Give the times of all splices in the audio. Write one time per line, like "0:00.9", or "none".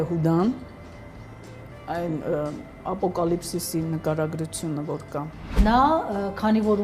0:05.6